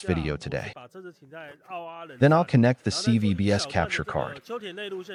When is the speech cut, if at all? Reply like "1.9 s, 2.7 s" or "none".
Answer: none